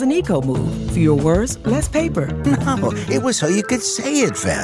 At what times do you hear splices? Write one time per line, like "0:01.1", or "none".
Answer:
none